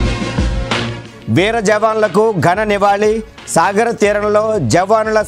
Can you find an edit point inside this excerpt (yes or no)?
yes